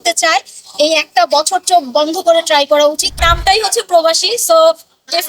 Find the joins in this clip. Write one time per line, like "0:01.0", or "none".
0:03.1